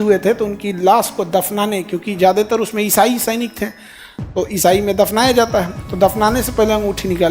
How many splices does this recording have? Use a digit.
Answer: 1